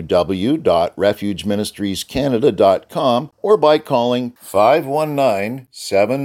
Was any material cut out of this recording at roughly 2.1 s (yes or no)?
no